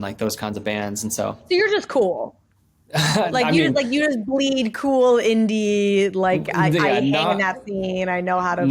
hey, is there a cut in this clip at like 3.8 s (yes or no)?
no